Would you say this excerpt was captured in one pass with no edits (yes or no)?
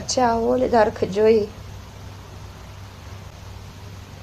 no